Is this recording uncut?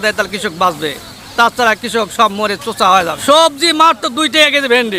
no; 1 cut; at 3.2 s

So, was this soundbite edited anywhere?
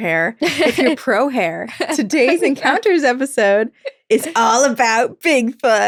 no; 0 cuts

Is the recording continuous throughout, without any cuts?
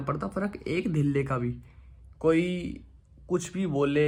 yes; 0 cuts

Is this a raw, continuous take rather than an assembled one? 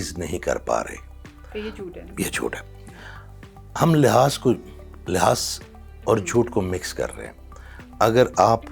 yes; 0 cuts

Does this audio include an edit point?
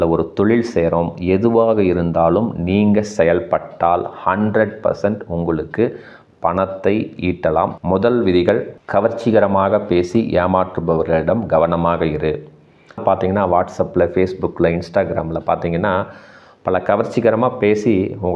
yes; 2 cuts; at 7.8 s, 13.0 s

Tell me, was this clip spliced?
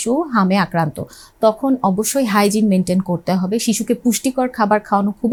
no; 0 cuts

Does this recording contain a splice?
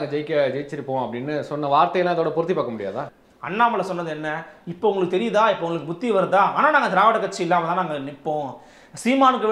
yes; 1 cut; at 3.0 s

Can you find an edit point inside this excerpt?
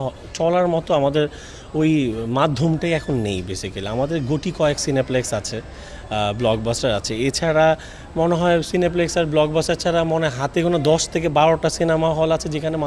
no; 0 cuts

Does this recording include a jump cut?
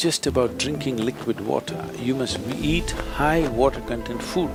no; 0 cuts

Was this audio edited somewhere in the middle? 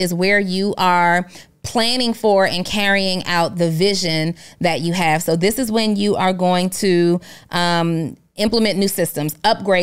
no; 0 cuts

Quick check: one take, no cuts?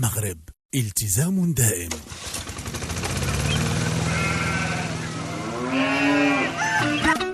no; 1 cut; at 1.9 s

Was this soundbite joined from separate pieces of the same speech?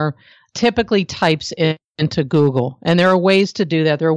no; 0 cuts

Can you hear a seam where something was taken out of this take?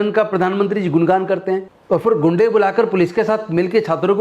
yes; 1 cut; at 1.7 s

